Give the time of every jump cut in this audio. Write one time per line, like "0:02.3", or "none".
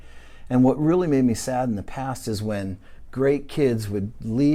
none